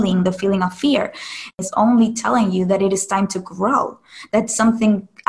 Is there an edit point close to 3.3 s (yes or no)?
no